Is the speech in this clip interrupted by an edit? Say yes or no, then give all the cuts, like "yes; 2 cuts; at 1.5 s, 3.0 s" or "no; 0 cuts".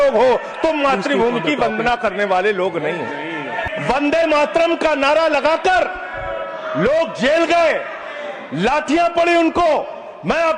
yes; 1 cut; at 3.6 s